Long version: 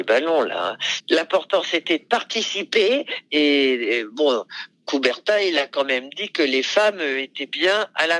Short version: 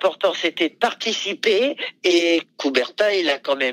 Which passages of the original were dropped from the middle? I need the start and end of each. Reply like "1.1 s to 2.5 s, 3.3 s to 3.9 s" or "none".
3.4 s to 4.3 s